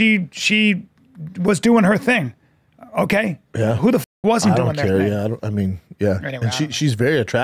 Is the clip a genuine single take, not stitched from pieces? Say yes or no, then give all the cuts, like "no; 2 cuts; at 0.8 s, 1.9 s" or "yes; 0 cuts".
yes; 0 cuts